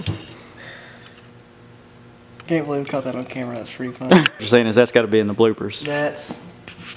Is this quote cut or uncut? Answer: cut